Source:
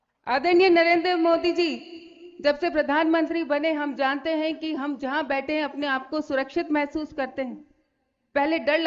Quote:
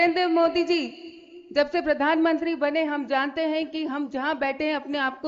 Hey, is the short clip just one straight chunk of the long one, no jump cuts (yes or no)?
yes